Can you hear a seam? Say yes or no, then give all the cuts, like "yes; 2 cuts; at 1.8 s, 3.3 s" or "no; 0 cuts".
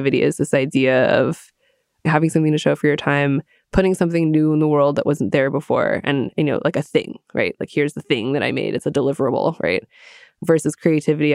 no; 0 cuts